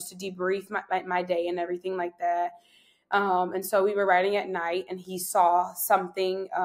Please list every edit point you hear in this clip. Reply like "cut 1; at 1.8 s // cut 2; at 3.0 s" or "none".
none